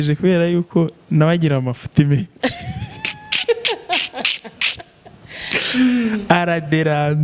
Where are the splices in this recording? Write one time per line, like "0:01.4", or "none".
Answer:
none